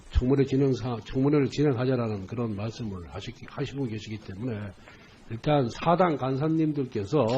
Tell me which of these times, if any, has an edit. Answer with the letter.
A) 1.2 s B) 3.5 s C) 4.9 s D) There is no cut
C